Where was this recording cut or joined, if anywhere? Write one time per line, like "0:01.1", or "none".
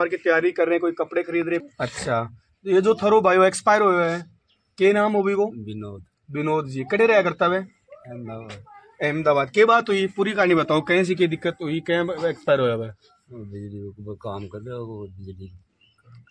0:01.7